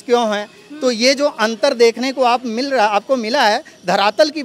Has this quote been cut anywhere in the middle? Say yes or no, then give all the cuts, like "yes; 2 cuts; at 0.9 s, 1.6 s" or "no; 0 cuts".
no; 0 cuts